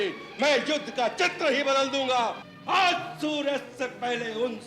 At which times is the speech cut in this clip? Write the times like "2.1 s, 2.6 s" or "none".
2.5 s